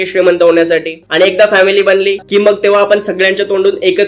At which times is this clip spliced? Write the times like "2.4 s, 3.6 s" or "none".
1.0 s, 2.2 s